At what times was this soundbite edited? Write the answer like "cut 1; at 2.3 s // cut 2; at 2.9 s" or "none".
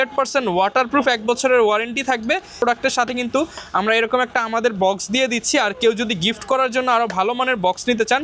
cut 1; at 2.6 s